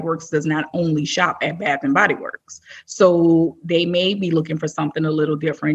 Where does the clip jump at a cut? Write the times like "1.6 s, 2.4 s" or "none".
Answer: none